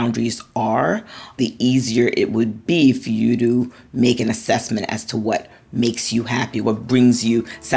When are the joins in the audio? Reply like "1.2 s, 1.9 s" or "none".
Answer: 1.4 s, 2.6 s, 6.6 s